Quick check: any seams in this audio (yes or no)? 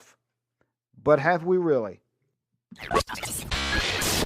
yes